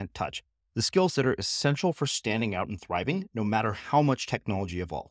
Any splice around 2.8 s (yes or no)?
no